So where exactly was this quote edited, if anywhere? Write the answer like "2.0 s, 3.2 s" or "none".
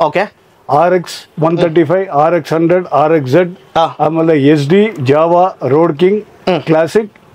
none